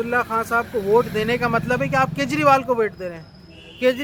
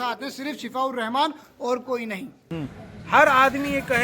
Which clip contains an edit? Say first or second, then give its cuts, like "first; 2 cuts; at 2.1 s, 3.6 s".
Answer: second; 1 cut; at 2.4 s